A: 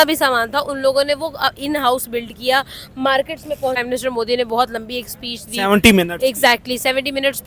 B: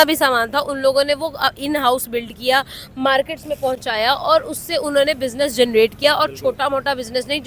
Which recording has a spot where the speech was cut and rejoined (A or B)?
A